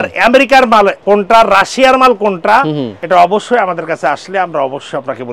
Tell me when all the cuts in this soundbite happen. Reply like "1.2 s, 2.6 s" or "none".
1.0 s, 2.9 s